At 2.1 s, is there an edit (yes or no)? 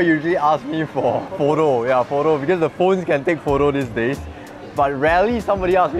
no